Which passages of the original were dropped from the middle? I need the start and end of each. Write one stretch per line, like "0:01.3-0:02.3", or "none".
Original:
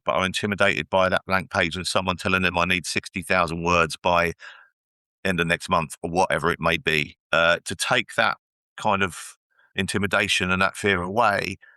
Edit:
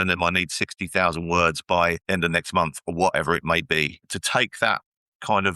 0:04.4-0:05.2
0:07.2-0:07.6